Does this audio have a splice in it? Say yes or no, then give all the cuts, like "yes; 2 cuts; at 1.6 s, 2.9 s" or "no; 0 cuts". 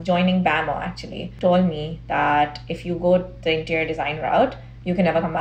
yes; 1 cut; at 1.3 s